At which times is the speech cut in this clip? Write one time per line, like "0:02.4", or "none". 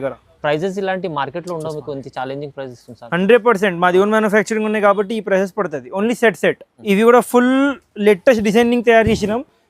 0:06.7

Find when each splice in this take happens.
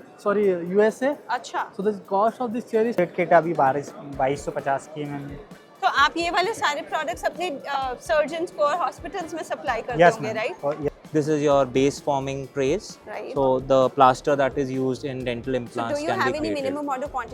0:03.0
0:10.8

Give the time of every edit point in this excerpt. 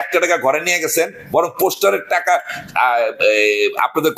none

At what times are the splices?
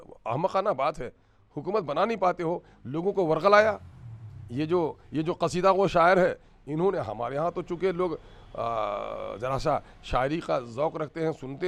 none

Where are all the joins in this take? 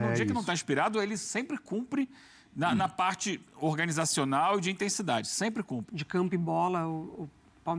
0:05.9

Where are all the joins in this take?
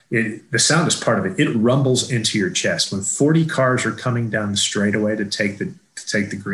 none

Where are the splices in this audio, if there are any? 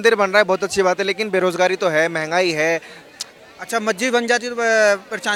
none

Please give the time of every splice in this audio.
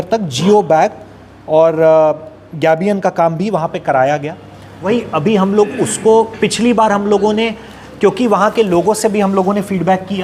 0:04.9

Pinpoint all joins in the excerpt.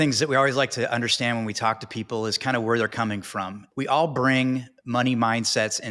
0:03.6

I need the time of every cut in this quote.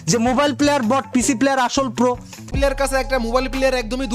0:02.4

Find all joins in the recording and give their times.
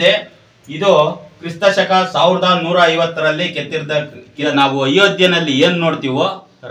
0:04.4

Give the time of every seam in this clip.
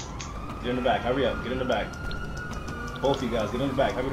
none

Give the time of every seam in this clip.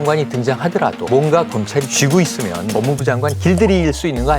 none

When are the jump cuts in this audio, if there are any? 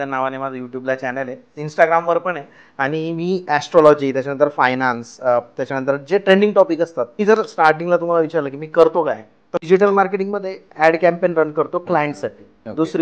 0:07.2
0:09.6

